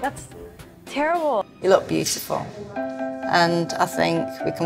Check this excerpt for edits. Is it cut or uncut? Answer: cut